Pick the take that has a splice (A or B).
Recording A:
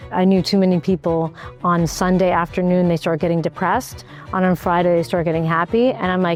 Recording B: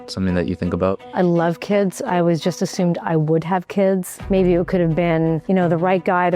B